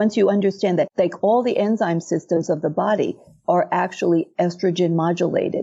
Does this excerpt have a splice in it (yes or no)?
yes